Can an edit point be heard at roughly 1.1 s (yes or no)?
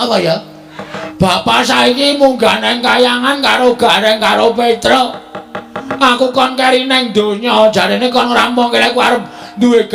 yes